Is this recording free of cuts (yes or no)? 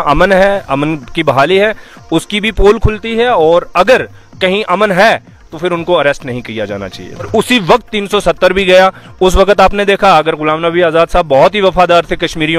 no